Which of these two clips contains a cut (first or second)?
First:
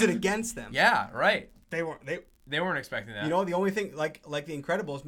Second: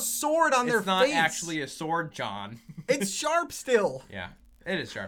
first